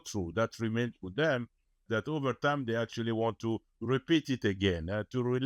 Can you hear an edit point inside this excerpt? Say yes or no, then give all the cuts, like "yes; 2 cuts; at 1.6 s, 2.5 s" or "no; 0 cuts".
yes; 1 cut; at 1.8 s